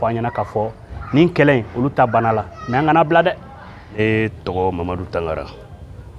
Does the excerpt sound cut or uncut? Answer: cut